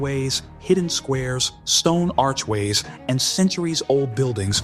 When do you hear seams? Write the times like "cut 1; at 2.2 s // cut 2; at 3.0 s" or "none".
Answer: none